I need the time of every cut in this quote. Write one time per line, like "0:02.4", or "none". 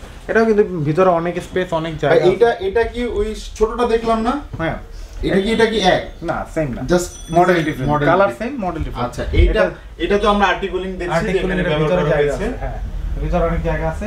none